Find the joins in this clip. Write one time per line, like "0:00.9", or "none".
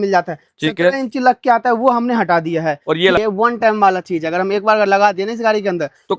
0:03.2

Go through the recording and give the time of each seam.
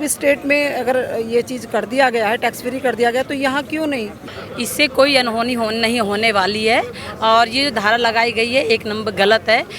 0:04.2

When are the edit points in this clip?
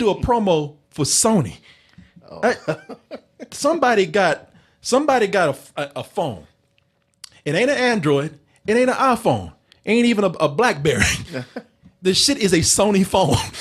none

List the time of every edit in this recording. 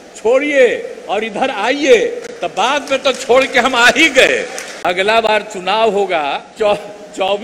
0:04.7
0:06.5

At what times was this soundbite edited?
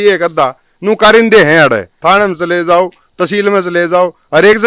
0:01.9

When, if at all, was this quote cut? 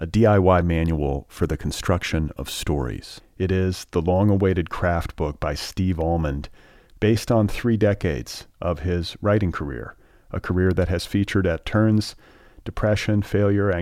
none

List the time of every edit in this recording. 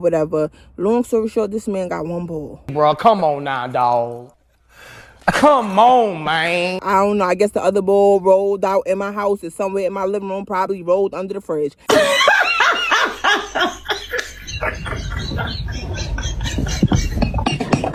none

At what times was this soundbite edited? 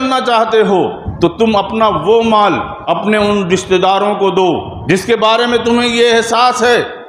0:01.0
0:02.7
0:04.7

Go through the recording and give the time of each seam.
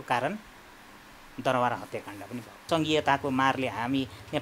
0:02.6

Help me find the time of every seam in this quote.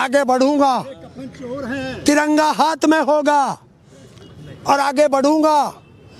none

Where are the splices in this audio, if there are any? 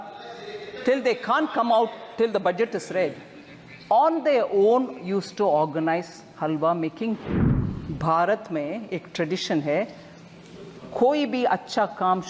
0:07.3

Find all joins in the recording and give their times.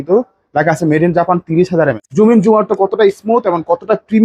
0:02.0

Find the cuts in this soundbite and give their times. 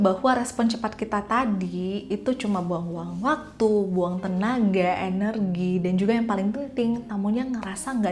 none

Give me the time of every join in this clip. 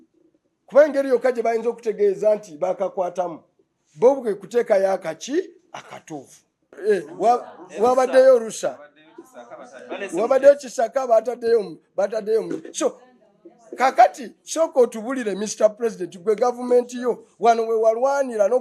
0:06.8

